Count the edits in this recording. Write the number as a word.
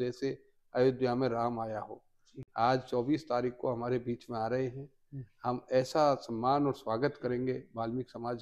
zero